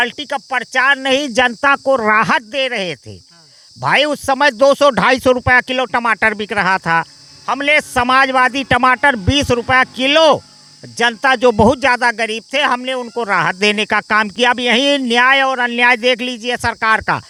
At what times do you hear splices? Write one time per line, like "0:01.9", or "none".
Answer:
none